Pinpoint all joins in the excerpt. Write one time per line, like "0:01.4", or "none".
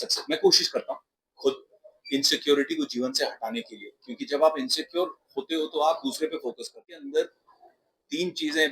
0:06.8